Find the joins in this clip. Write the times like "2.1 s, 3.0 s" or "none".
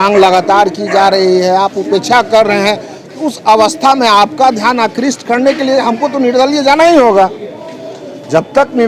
none

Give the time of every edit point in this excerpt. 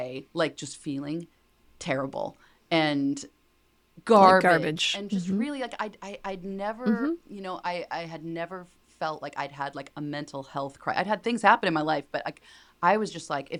none

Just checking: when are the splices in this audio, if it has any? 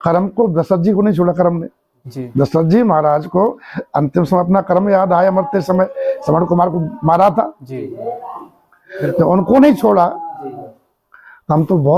none

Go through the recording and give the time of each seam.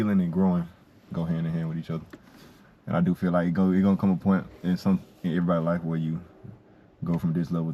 none

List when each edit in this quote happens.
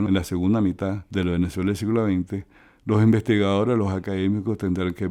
none

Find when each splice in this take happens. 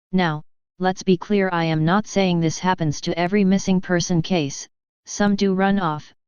5.4 s

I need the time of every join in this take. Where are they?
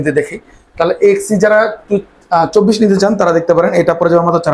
none

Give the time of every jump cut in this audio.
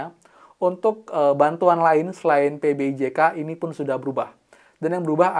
none

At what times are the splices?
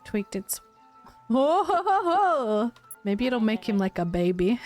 2.9 s

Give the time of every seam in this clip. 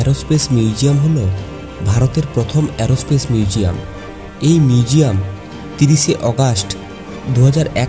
none

